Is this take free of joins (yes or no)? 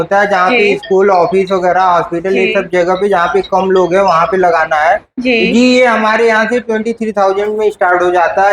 yes